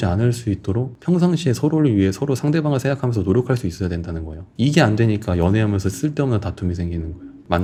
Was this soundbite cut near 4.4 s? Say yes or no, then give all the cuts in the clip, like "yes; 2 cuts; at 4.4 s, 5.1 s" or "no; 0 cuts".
no; 0 cuts